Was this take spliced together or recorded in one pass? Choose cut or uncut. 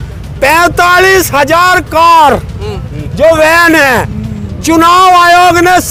uncut